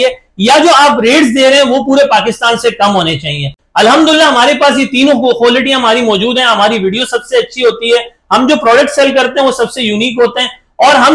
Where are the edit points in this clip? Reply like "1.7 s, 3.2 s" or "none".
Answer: none